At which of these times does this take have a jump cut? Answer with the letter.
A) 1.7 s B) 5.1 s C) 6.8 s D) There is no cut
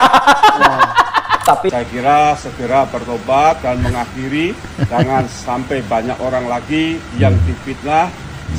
A